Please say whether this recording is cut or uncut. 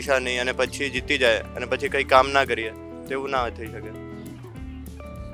uncut